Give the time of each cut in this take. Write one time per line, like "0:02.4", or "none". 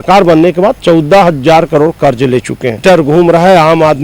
0:02.8